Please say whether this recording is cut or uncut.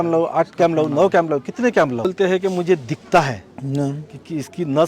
cut